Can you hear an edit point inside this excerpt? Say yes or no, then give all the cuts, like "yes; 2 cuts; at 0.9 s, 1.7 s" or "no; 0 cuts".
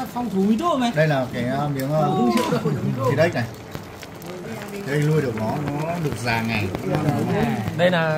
no; 0 cuts